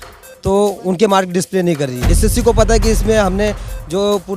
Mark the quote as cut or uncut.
cut